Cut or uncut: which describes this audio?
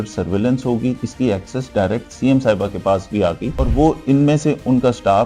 cut